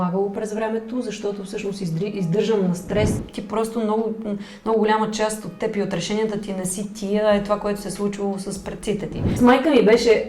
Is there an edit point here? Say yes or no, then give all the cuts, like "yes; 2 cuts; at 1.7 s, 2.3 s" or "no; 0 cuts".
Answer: yes; 2 cuts; at 3.3 s, 9.2 s